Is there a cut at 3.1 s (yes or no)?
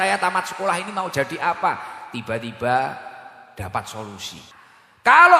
no